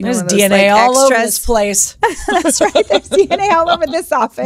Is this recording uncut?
yes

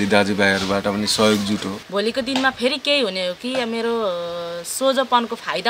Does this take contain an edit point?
yes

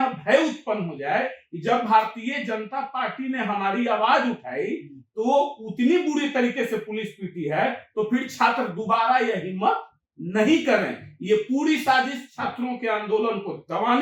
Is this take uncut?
yes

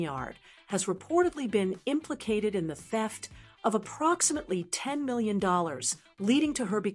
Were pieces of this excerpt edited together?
no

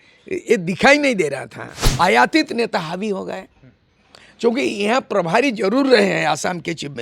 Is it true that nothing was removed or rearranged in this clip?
no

